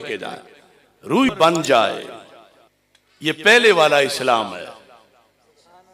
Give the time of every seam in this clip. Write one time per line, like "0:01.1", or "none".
0:01.3